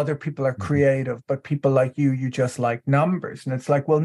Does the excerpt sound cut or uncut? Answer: uncut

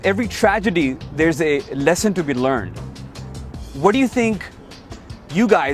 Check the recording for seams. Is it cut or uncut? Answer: uncut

